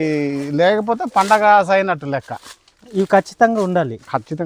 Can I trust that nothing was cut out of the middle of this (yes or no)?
yes